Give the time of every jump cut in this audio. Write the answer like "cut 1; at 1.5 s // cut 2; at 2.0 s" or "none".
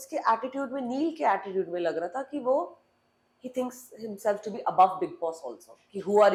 none